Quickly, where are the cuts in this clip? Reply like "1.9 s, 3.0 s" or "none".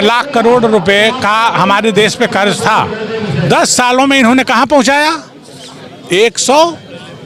none